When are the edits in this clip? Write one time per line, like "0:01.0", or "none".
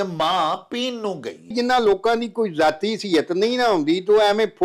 0:01.5